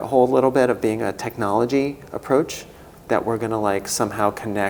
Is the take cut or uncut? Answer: uncut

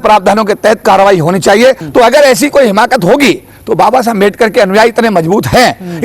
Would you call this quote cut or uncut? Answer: cut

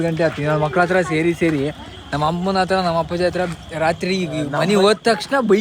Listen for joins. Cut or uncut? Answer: uncut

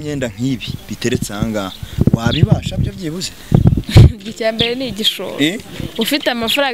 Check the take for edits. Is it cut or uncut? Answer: uncut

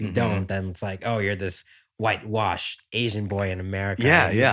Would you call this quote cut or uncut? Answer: uncut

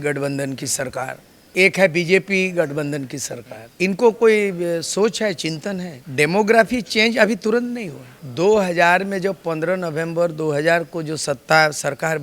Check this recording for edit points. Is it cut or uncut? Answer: uncut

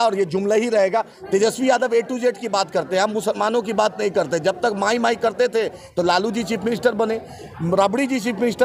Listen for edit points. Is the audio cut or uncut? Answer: cut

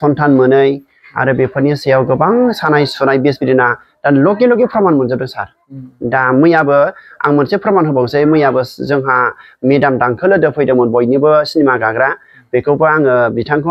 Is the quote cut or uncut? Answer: uncut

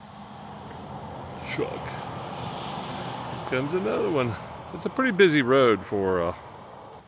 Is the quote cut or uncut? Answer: uncut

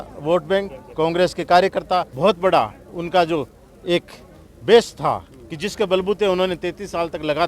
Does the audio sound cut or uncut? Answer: cut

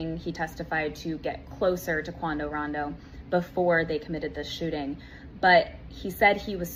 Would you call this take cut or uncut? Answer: uncut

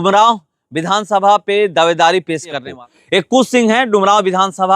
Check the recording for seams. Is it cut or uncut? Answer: cut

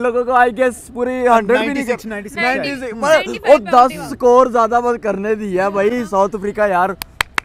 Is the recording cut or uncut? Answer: uncut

